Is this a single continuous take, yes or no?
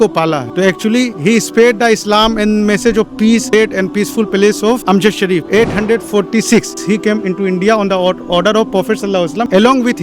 no